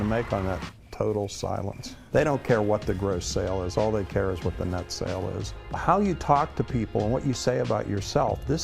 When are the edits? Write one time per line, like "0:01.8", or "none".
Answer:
0:02.0
0:05.5